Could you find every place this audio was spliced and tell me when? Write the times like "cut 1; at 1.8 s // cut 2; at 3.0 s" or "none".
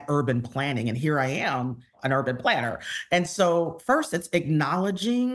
cut 1; at 1.9 s